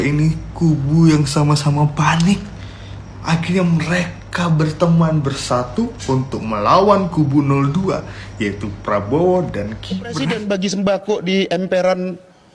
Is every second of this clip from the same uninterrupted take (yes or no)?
no